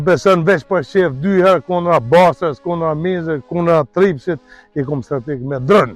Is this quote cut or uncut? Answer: uncut